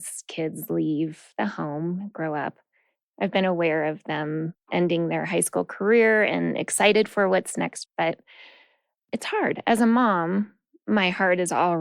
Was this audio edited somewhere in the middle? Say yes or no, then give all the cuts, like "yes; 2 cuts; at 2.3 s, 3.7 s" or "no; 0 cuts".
yes; 1 cut; at 3.0 s